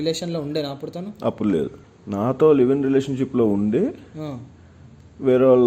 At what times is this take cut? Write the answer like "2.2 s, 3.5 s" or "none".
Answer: 1.8 s